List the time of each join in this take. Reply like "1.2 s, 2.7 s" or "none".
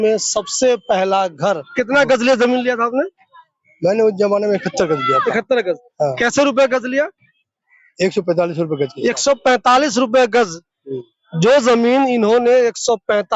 1.7 s